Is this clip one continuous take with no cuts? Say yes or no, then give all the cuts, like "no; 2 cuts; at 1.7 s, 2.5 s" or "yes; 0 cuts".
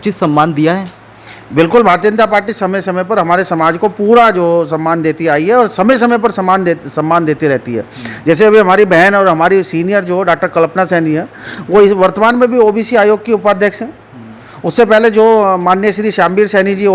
yes; 0 cuts